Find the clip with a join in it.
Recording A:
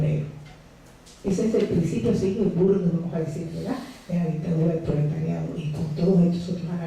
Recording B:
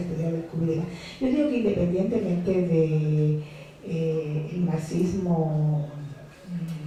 A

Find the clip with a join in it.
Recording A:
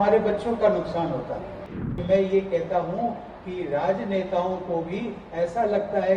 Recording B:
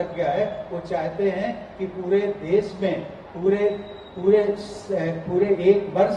A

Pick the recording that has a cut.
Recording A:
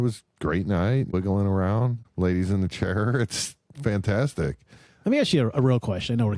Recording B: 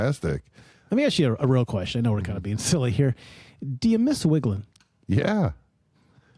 A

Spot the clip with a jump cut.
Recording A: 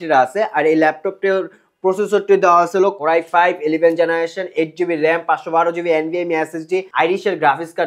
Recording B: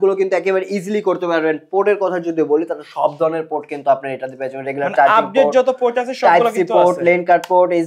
A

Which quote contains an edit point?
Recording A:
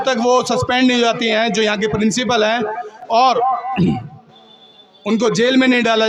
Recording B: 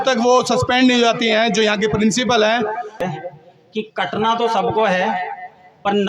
B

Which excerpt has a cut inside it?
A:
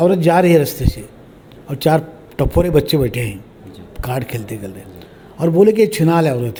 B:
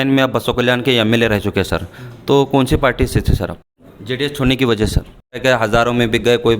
B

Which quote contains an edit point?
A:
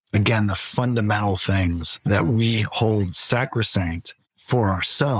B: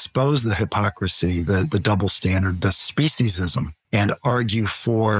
B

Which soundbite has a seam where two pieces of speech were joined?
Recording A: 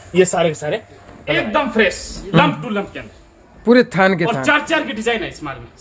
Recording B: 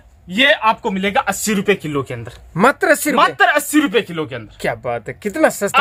A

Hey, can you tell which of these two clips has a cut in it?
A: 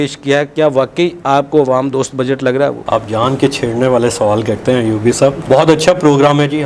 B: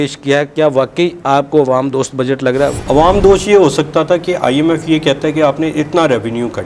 B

